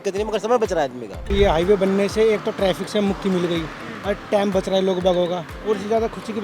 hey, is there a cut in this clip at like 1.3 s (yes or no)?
yes